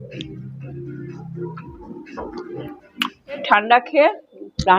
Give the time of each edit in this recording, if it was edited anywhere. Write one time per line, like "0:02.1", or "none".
0:03.4